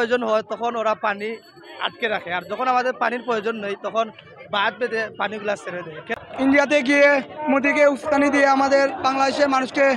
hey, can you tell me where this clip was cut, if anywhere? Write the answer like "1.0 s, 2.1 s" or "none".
6.0 s